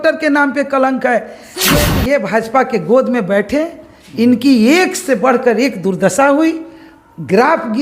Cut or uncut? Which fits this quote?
cut